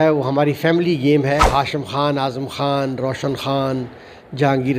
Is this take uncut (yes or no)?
no